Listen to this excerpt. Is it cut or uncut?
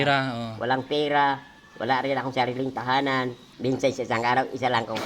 cut